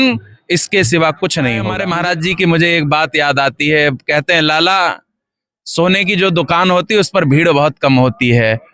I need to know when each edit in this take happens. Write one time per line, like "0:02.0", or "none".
0:01.7